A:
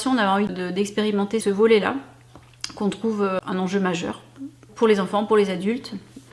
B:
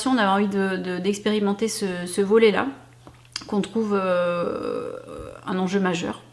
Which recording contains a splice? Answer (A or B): A